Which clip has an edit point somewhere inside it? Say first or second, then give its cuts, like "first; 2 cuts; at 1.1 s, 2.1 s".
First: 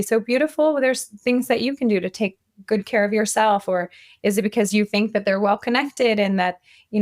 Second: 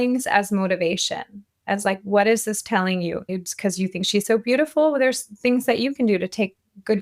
second; 1 cut; at 3.3 s